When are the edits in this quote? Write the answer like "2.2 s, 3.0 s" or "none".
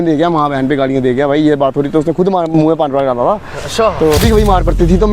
4.2 s